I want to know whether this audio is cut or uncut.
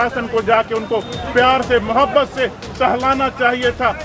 uncut